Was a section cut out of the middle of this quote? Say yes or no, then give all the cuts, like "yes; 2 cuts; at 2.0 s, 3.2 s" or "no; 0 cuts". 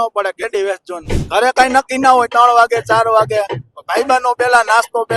yes; 1 cut; at 1.0 s